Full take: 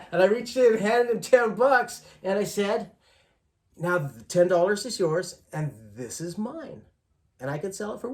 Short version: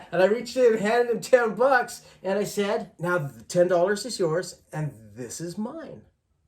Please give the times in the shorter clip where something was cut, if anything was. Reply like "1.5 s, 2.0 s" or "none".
2.9 s